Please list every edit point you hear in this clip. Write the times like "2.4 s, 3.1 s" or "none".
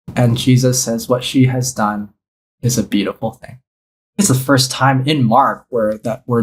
4.2 s